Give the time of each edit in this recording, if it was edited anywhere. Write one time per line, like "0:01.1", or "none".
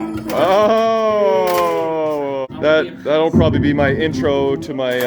0:02.5